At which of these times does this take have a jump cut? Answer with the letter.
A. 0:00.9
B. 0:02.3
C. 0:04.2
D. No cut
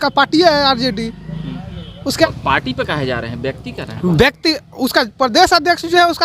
B